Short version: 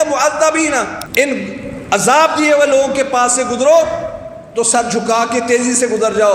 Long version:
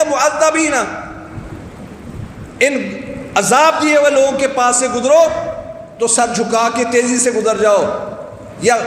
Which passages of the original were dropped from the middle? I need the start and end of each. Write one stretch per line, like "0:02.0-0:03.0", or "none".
0:01.0-0:02.4